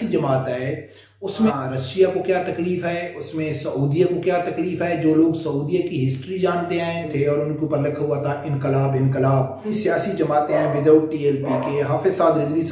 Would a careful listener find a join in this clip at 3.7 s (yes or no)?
no